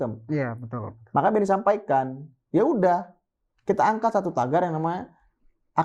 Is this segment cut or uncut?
uncut